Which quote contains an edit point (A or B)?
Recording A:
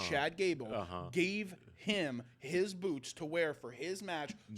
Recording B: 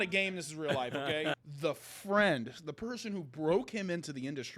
B